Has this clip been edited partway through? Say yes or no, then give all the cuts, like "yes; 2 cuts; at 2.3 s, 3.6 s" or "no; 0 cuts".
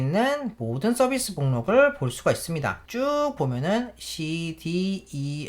yes; 1 cut; at 2.8 s